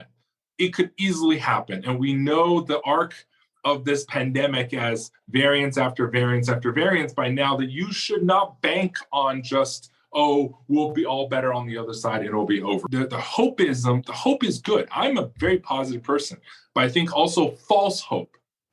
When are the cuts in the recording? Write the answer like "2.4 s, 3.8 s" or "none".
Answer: 12.9 s